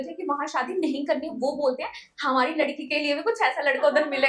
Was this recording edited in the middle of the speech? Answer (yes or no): no